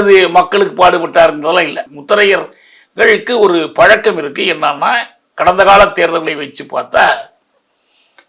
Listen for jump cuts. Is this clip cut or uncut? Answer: cut